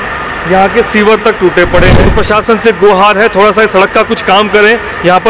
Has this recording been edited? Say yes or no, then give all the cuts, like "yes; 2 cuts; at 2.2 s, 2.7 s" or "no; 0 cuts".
yes; 1 cut; at 2.1 s